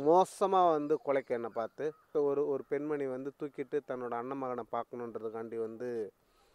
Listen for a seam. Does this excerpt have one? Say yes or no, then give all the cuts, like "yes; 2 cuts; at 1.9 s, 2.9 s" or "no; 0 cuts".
yes; 1 cut; at 2.1 s